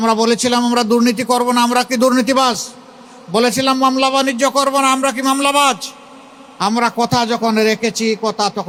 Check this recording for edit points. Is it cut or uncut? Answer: uncut